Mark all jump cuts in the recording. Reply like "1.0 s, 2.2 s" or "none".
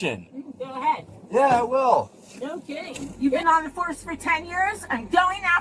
3.0 s